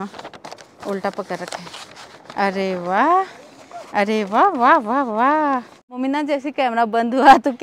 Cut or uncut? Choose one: cut